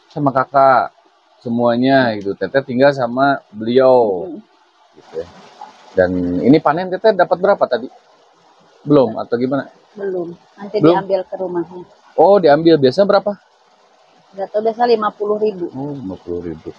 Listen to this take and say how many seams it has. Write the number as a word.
one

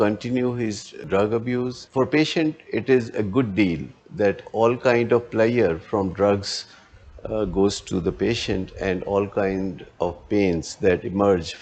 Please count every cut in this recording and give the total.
one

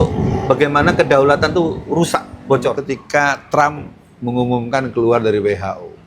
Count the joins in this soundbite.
one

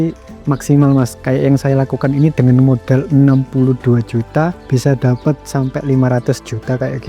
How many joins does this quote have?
one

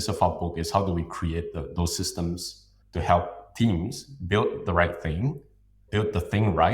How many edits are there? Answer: one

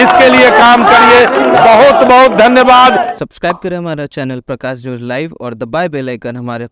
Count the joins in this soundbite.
one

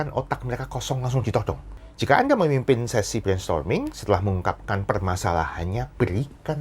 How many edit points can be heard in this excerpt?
one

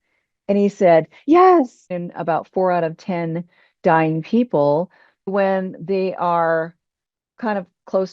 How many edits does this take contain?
two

